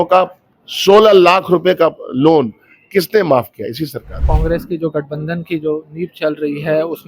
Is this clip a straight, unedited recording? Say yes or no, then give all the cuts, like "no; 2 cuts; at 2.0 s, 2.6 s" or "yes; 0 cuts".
no; 1 cut; at 4.3 s